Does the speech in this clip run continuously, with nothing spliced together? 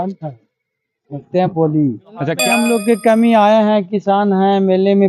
no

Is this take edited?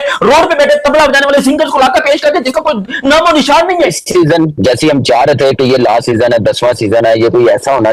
yes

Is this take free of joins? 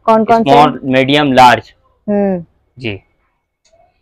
yes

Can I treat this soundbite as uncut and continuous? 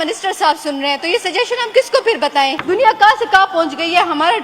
no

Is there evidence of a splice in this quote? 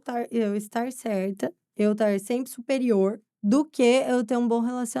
yes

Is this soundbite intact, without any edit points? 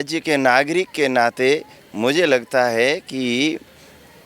yes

